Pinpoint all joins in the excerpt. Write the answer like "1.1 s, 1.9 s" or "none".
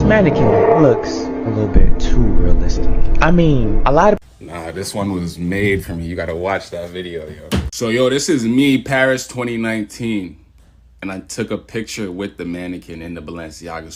none

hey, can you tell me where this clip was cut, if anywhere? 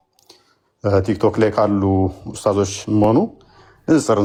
none

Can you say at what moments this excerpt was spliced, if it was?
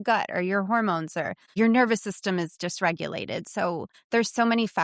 1.5 s, 3.9 s

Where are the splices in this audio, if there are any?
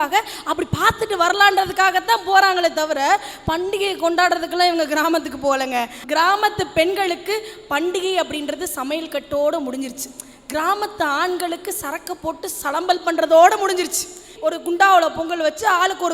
6.0 s, 14.3 s

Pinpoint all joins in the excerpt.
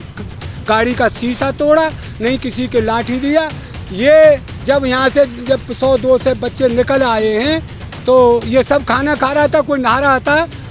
none

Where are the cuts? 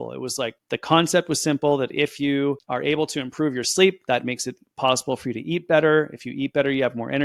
none

